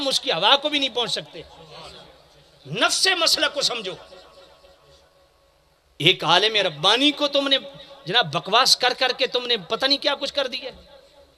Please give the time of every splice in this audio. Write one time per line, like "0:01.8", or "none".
none